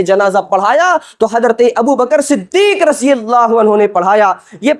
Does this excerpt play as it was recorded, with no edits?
yes; 0 cuts

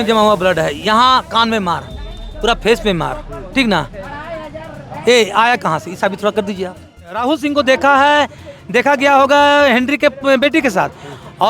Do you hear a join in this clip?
yes; 1 cut; at 7.2 s

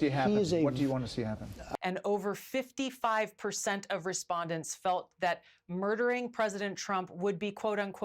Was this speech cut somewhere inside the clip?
yes; 1 cut; at 1.6 s

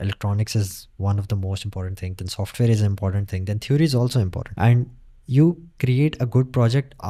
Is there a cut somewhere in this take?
no; 0 cuts

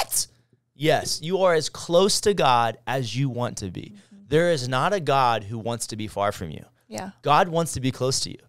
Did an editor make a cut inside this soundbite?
no; 0 cuts

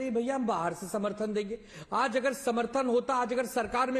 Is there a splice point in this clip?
no; 0 cuts

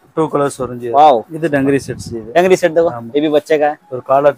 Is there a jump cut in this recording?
yes; 1 cut; at 1.3 s

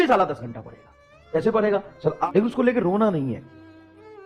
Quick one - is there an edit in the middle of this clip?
yes; 1 cut; at 2.3 s

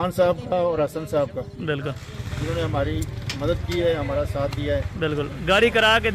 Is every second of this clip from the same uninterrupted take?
yes; 0 cuts

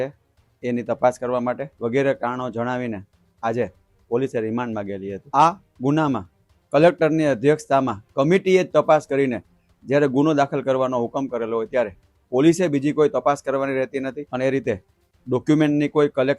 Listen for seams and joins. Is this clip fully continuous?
no; 3 cuts; at 1.7 s, 5.2 s, 14.2 s

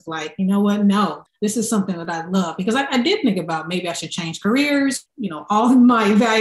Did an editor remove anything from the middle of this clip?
yes; 1 cut; at 5.0 s

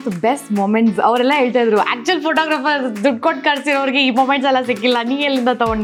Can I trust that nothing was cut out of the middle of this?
yes; 0 cuts

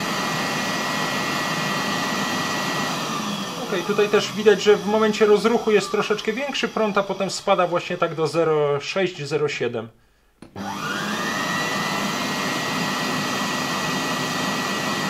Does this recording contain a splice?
no; 0 cuts

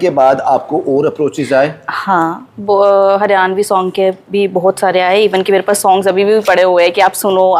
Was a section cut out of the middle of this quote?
no; 0 cuts

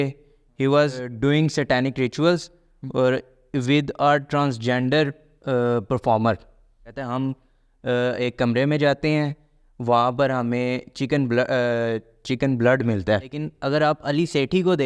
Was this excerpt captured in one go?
no; 3 cuts; at 1.1 s, 7.1 s, 13.5 s

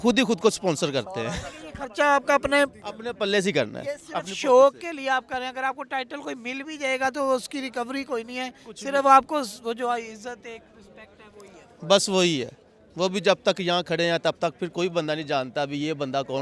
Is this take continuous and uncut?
yes; 0 cuts

